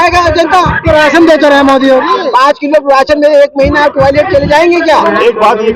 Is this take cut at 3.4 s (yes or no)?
no